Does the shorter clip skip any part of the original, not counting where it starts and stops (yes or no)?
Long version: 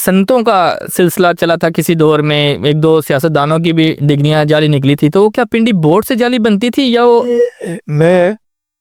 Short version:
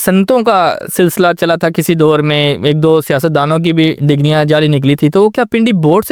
no